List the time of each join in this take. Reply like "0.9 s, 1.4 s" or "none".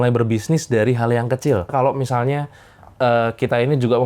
1.7 s